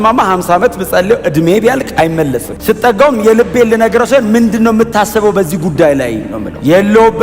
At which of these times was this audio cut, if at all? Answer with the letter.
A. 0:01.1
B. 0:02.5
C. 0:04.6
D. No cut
B